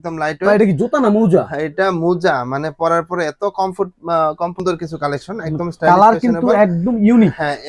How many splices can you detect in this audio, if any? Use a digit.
1